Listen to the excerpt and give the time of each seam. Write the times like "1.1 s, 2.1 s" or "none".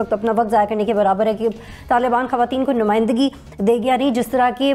none